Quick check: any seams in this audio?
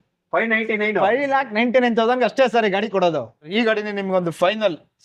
yes; 1 cut; at 3.5 s

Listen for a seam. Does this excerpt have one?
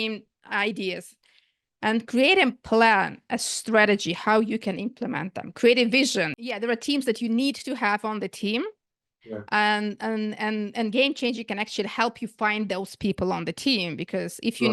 yes; 1 cut; at 6.4 s

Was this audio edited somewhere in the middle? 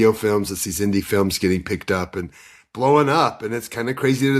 no; 0 cuts

